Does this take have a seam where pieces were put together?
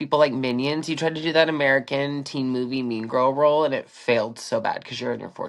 no; 0 cuts

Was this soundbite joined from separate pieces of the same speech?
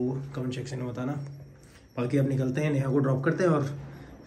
no; 0 cuts

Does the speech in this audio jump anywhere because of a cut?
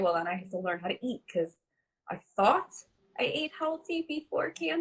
no; 0 cuts

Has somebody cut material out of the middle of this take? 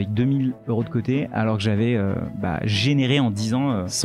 no; 0 cuts

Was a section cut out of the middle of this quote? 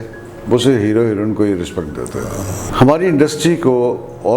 yes; 1 cut; at 2.7 s

